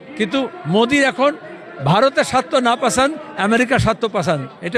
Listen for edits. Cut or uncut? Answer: uncut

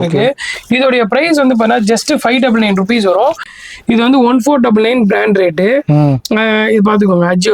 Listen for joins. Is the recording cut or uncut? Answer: cut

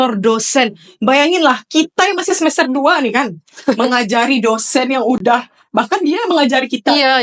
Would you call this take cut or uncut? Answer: uncut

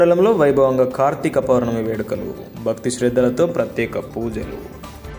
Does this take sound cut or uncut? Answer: uncut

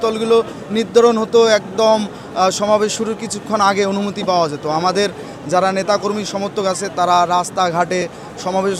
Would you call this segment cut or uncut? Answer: uncut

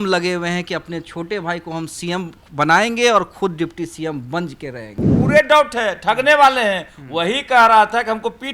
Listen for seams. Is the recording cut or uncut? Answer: cut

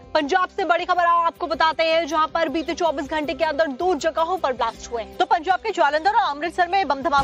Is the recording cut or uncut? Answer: cut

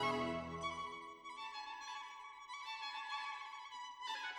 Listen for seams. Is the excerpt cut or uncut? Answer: uncut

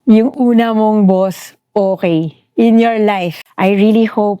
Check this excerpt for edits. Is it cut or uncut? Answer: cut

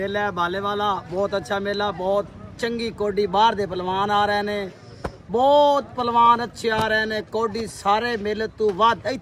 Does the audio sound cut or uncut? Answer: uncut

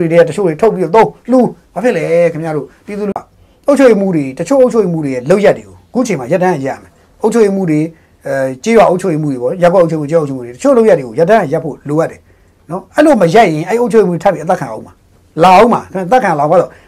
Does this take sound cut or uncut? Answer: cut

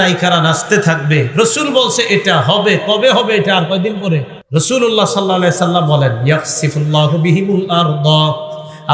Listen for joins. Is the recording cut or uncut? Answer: cut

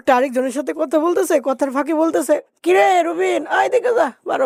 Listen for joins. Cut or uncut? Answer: uncut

